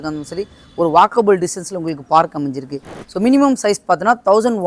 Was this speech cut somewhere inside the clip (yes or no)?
yes